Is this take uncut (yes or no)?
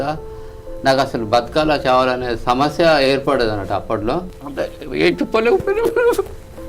no